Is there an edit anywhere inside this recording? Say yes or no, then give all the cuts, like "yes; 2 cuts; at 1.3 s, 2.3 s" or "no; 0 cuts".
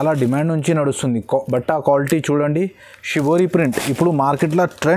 no; 0 cuts